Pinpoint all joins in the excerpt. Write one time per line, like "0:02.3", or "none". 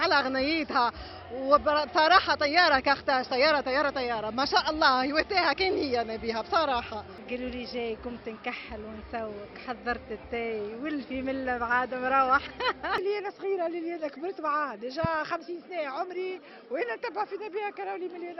0:07.2
0:13.0